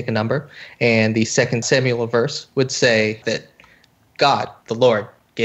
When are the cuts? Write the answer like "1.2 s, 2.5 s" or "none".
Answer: 1.6 s, 3.2 s, 4.6 s